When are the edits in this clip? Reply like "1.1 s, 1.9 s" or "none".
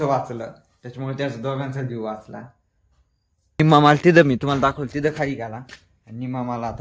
3.6 s